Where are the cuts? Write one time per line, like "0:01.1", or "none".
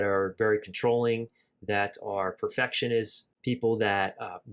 0:03.2